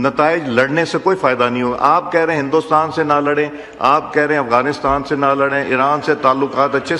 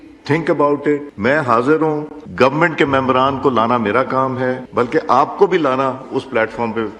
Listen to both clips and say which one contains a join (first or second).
second